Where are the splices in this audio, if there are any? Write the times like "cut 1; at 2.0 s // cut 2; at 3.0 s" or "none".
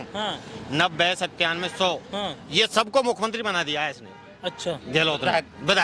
none